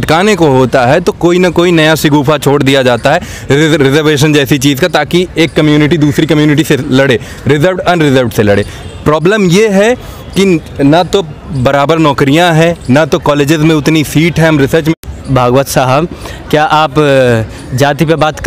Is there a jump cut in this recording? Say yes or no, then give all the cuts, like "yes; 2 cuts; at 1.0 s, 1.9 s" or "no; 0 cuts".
yes; 1 cut; at 15.0 s